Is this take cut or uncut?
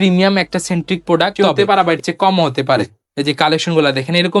cut